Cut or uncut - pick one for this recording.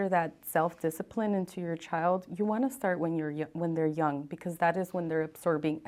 uncut